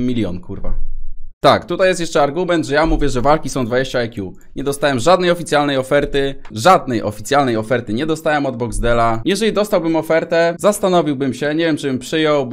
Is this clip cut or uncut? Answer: uncut